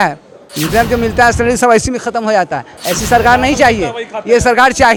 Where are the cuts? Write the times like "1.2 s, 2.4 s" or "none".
none